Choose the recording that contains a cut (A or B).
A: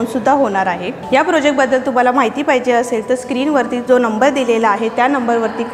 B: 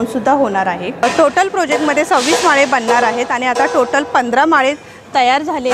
B